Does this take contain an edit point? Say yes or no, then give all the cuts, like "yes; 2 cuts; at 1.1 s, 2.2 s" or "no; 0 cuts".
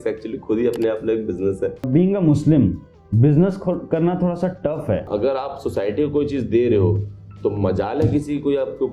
yes; 2 cuts; at 1.8 s, 5.1 s